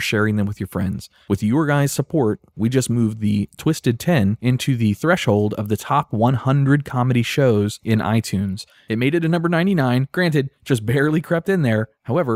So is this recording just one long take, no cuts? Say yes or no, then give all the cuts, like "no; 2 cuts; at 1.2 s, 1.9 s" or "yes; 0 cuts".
yes; 0 cuts